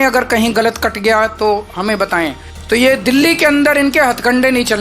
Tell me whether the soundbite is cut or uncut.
cut